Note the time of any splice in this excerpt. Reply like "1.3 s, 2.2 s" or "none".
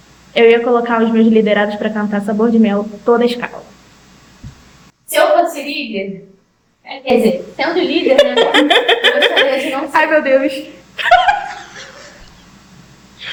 none